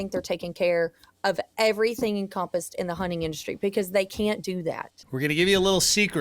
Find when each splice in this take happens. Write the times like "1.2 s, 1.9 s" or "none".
5.0 s

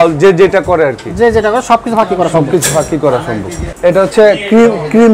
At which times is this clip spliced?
none

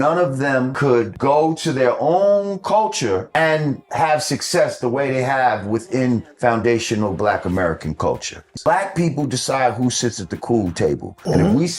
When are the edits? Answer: 8.4 s

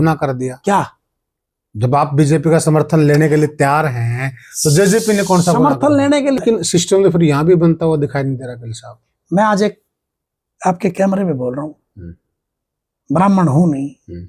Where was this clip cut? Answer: 6.5 s

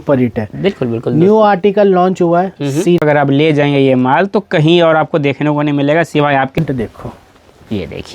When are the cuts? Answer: 3.0 s, 6.6 s

